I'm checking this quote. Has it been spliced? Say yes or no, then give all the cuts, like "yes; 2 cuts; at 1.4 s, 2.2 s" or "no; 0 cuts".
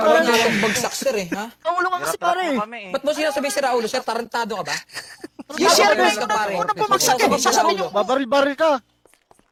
no; 0 cuts